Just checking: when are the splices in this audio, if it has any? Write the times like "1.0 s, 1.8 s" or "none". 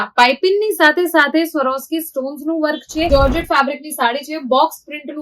3.1 s